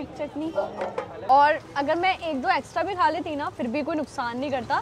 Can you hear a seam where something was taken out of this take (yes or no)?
yes